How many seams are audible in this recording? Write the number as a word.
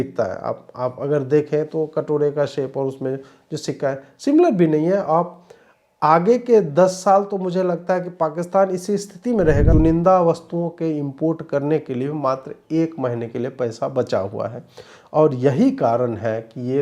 one